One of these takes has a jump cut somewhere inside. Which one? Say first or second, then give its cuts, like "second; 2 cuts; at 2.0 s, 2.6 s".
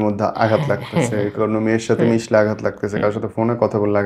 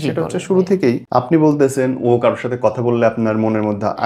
second; 1 cut; at 1.0 s